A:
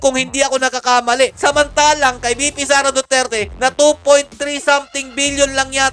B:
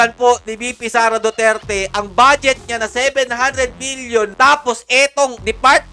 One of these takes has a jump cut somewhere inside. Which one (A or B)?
B